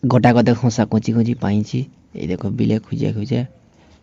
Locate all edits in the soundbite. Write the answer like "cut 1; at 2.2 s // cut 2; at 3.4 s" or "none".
none